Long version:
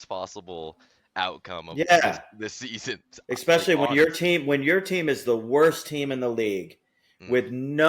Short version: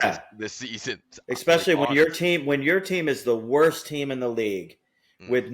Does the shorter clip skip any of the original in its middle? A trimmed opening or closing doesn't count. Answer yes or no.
no